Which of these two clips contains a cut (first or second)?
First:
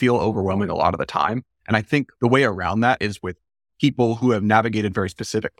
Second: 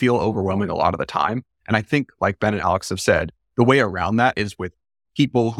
first